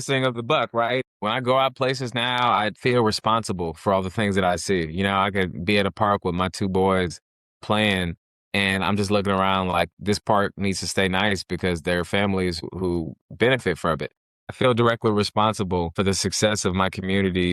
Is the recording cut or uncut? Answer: cut